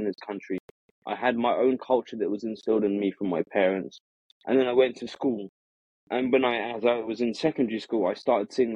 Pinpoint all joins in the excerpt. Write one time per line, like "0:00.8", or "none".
none